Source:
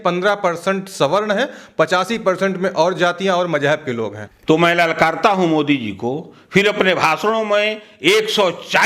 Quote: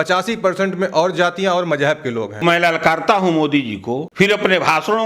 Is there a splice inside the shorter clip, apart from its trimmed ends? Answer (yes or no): yes